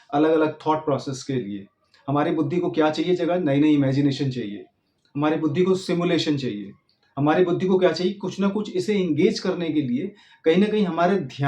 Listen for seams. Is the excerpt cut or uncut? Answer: uncut